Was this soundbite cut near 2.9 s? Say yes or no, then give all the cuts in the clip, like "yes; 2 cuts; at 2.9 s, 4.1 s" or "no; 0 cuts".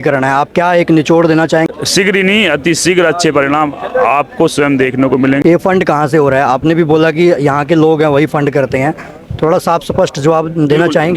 no; 2 cuts; at 1.7 s, 5.4 s